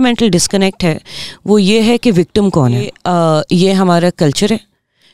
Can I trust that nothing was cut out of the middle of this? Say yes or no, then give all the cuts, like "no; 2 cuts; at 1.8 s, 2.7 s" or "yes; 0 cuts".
no; 1 cut; at 2.9 s